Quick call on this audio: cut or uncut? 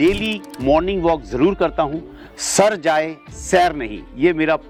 uncut